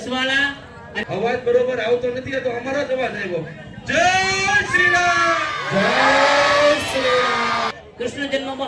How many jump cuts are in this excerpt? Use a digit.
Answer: 2